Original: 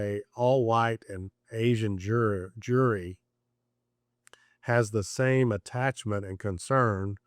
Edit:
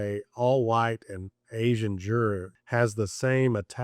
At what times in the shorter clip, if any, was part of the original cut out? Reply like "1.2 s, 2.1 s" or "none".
2.5 s